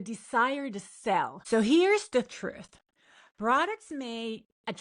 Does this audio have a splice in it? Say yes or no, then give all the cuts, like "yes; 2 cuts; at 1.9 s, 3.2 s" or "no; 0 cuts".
yes; 1 cut; at 1.4 s